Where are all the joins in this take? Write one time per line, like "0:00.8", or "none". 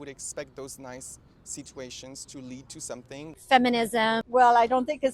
0:03.4
0:04.2